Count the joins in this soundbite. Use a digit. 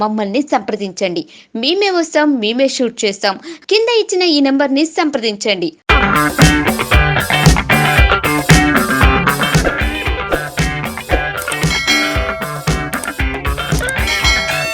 0